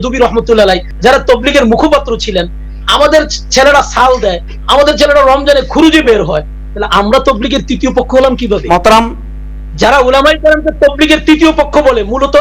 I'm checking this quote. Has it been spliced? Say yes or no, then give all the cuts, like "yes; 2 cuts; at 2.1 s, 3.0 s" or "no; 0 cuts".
no; 0 cuts